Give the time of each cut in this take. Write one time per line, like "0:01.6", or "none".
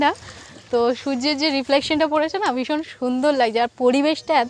none